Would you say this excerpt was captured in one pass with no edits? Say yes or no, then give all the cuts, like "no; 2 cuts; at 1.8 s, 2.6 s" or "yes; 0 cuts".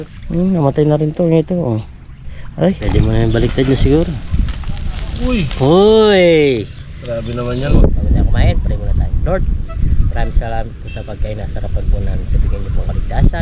no; 2 cuts; at 2.8 s, 7.7 s